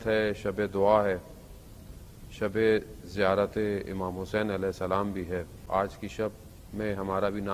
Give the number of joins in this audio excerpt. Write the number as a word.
one